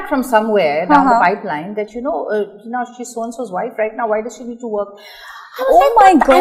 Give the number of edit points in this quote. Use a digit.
0